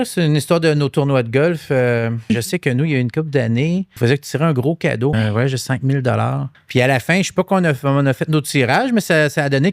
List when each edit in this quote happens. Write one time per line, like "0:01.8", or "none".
0:02.2
0:03.9
0:05.1
0:06.5